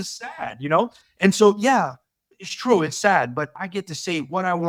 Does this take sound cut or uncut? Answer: uncut